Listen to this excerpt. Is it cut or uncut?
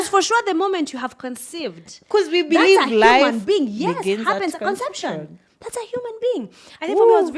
uncut